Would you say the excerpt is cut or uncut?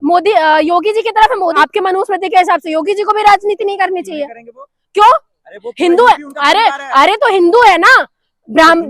cut